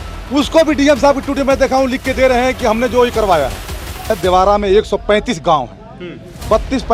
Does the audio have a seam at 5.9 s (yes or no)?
no